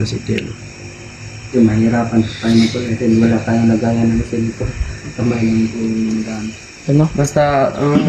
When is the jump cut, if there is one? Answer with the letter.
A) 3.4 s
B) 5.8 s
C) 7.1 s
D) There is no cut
D